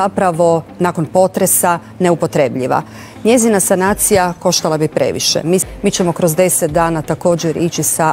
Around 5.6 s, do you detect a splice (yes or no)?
yes